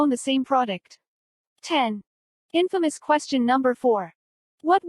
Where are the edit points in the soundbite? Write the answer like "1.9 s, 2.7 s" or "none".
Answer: 1.8 s, 3.1 s